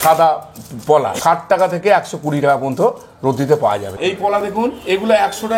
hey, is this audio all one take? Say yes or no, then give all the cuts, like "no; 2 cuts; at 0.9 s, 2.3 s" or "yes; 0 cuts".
no; 2 cuts; at 1.1 s, 3.9 s